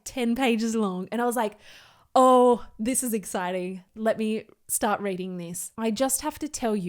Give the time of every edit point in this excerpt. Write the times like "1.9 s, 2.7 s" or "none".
3.9 s, 5.7 s